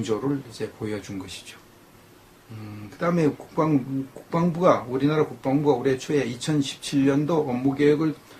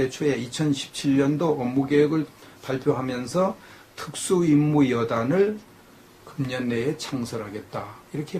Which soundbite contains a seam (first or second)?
first